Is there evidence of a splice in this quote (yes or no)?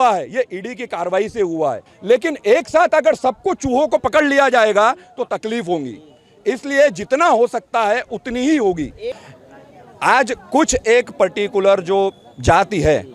yes